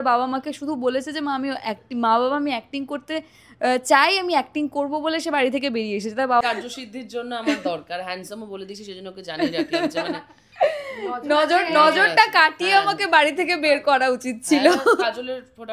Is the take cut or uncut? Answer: cut